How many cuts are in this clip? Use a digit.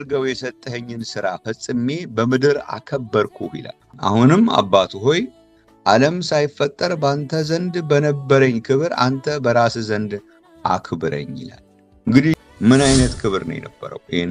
1